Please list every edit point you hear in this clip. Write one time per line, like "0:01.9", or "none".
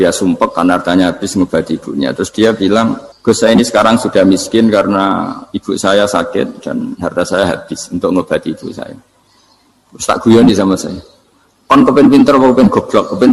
0:03.1